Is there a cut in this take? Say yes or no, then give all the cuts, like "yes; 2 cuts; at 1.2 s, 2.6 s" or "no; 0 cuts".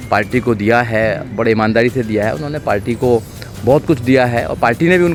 no; 0 cuts